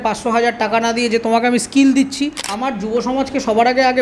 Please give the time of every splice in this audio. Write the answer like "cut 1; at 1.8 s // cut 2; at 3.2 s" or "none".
cut 1; at 2.5 s